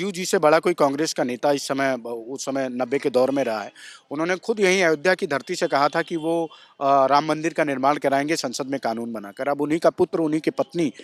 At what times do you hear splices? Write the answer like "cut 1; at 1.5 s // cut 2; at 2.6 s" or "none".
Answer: none